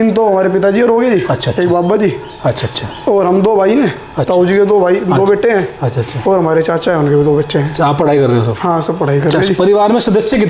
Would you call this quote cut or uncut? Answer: uncut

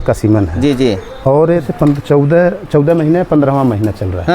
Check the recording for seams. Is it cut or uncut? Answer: cut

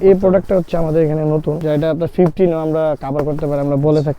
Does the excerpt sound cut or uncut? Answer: cut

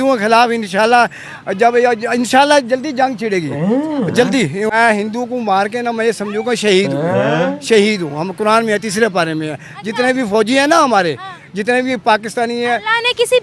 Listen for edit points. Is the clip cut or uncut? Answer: cut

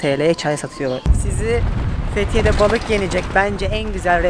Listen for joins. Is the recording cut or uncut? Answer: cut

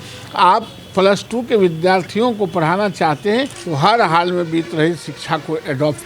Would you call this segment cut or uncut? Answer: cut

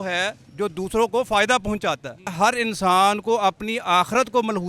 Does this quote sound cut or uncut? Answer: cut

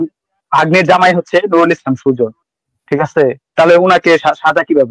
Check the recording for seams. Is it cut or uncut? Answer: uncut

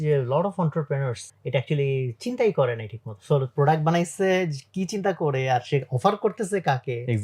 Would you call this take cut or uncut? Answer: cut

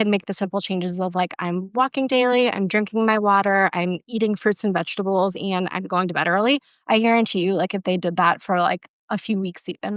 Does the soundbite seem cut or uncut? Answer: uncut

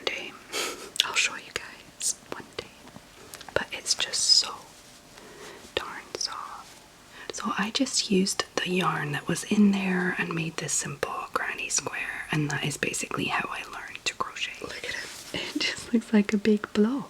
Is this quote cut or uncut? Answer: cut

